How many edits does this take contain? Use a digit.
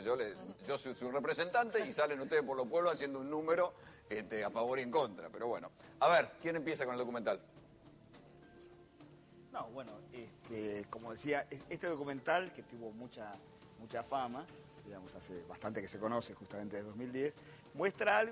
0